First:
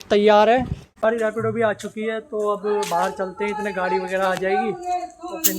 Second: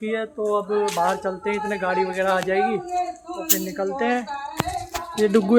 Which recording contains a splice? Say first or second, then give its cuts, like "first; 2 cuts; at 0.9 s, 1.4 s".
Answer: first; 1 cut; at 1.0 s